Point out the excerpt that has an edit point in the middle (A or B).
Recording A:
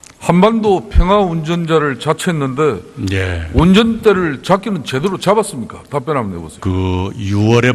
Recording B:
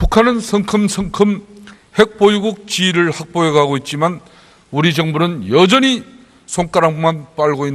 A